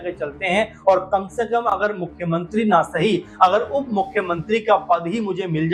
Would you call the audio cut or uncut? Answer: uncut